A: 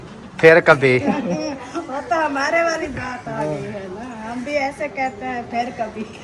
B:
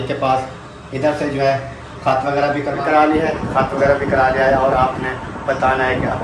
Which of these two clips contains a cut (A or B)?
B